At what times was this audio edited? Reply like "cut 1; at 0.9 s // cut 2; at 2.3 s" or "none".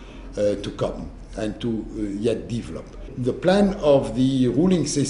cut 1; at 2.5 s